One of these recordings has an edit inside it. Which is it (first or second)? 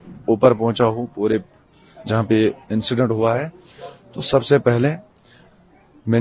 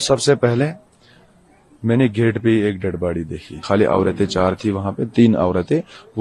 second